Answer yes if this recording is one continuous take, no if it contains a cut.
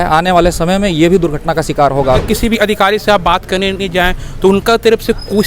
no